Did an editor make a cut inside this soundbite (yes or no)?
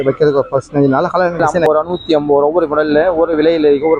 yes